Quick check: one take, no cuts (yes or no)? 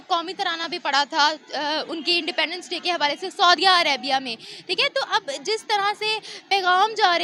yes